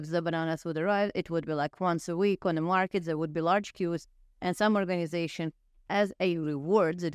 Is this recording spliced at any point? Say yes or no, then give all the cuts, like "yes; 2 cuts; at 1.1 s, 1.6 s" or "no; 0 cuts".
no; 0 cuts